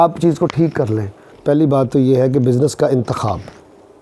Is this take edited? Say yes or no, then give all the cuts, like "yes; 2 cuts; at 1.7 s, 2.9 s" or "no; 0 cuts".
yes; 1 cut; at 1.4 s